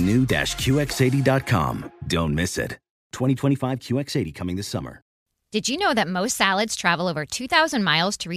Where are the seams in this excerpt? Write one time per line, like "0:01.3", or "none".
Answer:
0:05.2